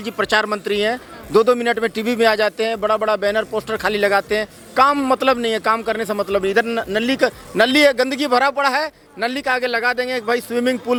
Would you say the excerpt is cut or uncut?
uncut